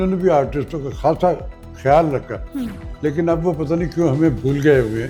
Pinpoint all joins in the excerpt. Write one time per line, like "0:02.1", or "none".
none

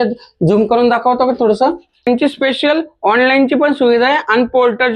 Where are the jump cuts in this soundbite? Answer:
0:02.1

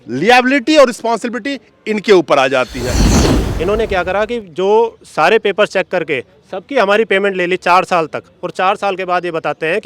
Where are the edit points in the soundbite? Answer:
0:03.0

